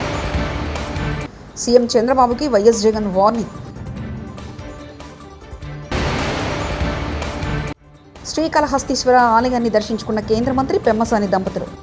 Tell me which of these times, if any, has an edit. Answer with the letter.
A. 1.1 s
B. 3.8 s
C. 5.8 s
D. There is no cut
D